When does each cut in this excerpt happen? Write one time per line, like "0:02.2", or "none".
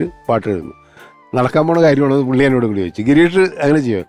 none